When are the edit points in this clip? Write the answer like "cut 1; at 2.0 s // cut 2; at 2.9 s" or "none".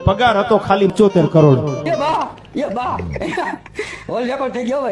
cut 1; at 0.9 s // cut 2; at 1.9 s